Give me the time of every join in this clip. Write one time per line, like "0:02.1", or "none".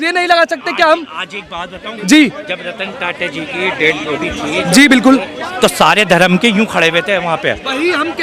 none